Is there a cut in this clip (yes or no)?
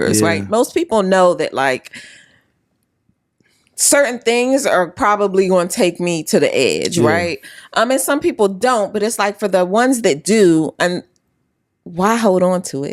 no